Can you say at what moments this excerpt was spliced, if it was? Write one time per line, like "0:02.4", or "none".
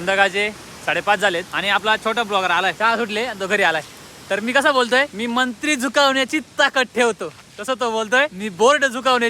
0:01.5
0:02.8
0:05.1
0:08.4

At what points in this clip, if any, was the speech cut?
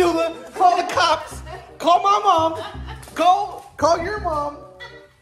none

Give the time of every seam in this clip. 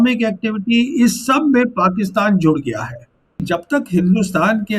0:03.4

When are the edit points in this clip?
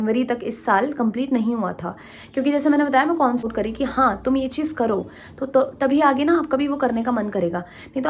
0:03.4

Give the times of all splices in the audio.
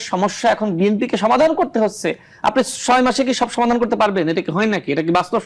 none

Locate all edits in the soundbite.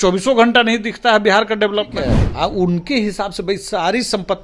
0:02.2

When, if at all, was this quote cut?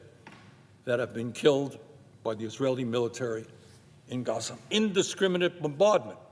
0:04.7

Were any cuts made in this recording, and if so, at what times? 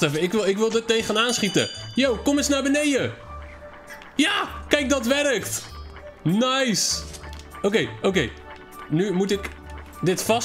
none

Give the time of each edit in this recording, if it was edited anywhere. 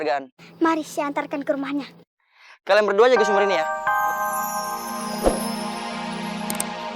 0:03.6

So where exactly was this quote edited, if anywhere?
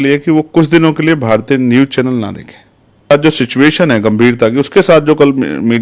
0:03.1

